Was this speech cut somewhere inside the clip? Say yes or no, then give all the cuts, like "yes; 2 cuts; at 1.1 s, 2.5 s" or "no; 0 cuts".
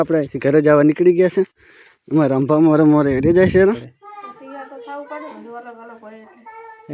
yes; 1 cut; at 3.8 s